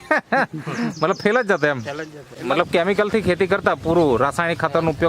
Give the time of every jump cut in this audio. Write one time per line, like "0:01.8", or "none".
0:02.3